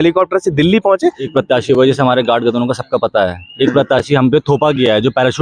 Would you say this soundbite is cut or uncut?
cut